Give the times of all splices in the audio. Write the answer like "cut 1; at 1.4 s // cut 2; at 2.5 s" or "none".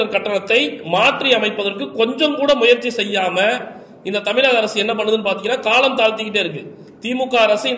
none